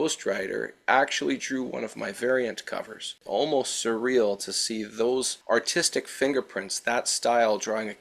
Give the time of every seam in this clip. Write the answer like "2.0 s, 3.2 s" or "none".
3.1 s